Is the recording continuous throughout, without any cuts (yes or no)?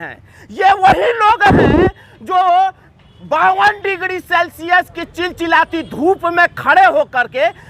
yes